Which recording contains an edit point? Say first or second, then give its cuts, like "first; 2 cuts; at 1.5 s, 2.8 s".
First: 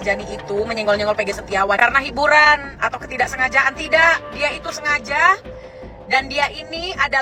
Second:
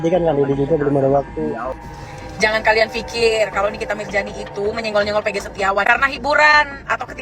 second; 1 cut; at 1.8 s